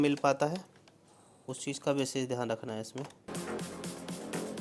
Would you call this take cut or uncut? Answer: uncut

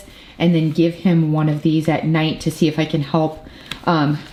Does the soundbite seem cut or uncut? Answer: uncut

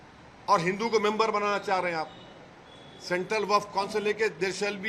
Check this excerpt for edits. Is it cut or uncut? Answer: uncut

